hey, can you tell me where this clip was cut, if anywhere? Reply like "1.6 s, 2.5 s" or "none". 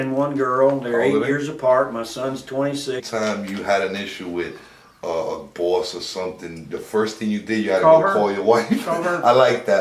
none

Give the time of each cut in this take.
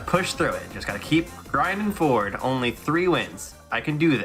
none

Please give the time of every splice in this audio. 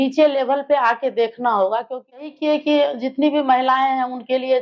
2.3 s

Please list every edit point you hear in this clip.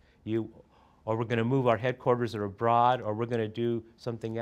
none

